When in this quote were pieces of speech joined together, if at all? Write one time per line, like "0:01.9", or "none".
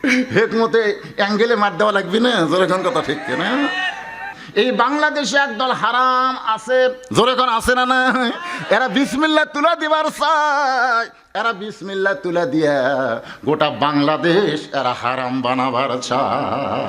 0:04.3